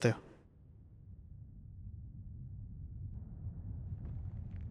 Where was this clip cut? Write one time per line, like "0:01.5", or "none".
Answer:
0:03.1